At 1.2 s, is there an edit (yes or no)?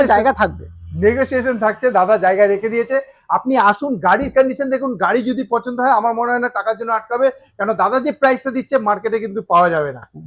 no